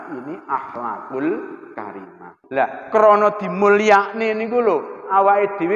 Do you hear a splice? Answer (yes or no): yes